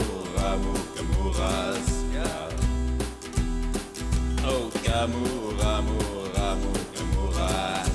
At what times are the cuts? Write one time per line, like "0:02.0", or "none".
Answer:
0:04.6